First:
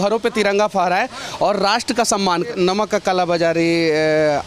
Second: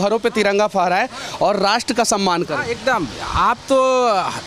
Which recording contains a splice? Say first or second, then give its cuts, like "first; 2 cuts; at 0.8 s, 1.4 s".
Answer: first; 1 cut; at 2.5 s